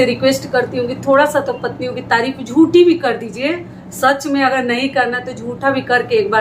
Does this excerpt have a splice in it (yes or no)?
no